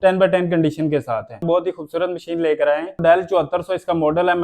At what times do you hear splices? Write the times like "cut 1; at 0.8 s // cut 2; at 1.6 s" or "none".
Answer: cut 1; at 1.4 s // cut 2; at 3.0 s